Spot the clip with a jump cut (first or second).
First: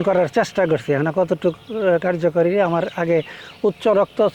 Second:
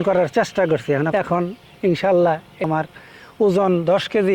second